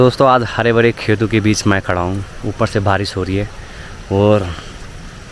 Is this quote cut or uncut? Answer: uncut